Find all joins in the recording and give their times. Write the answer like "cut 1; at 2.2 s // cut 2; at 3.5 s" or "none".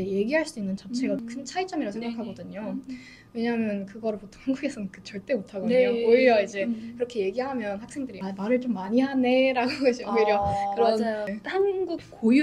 cut 1; at 1.2 s // cut 2; at 8.2 s